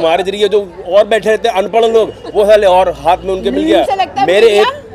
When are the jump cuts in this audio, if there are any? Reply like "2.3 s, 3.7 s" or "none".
3.9 s